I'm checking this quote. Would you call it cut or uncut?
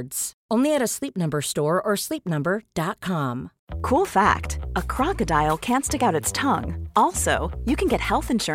uncut